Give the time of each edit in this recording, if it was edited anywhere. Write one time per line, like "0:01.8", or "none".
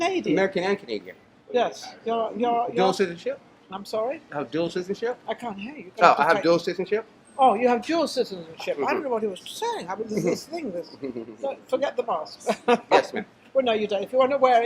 0:09.1